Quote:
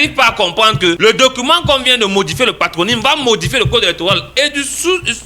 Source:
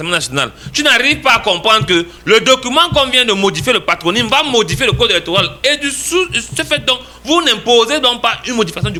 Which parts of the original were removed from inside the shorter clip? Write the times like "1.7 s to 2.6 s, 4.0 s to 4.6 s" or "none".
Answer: 2.0 s to 2.2 s